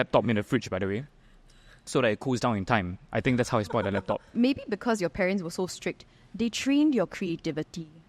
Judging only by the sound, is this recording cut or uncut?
cut